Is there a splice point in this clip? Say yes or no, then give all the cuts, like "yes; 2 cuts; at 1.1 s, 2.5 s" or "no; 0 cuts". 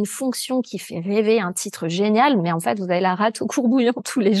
no; 0 cuts